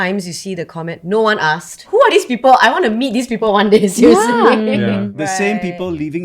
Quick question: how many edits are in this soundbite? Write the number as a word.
two